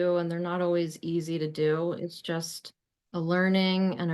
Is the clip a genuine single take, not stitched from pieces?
yes; 0 cuts

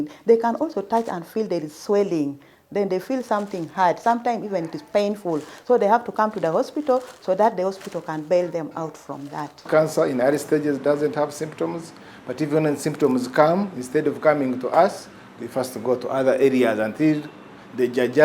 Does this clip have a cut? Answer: yes; 1 cut; at 9.6 s

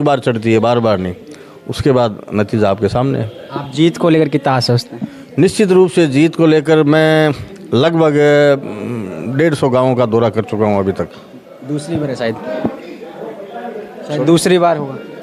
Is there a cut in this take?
no; 0 cuts

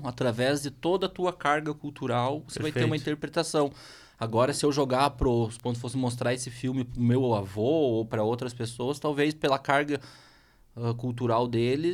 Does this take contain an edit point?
no; 0 cuts

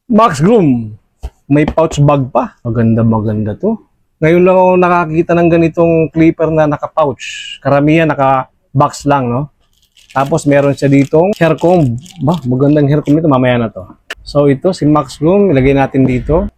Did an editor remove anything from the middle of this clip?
no; 0 cuts

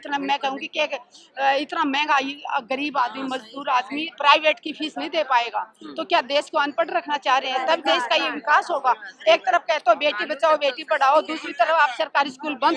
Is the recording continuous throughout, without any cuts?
yes; 0 cuts

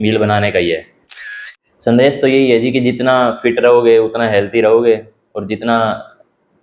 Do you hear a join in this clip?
yes; 1 cut; at 1.2 s

